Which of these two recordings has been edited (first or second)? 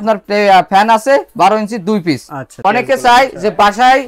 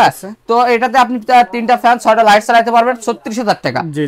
first